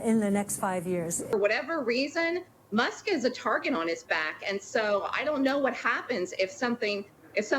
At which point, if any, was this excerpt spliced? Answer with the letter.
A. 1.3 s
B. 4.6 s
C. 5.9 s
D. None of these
A